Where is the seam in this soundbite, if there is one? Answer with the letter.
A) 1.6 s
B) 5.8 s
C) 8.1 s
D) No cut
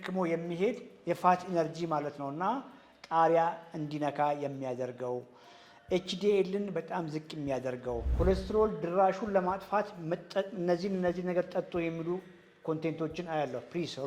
C